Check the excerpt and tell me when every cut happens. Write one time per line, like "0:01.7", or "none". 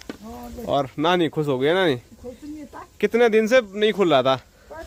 none